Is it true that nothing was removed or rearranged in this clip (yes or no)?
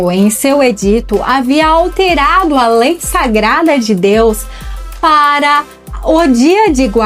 yes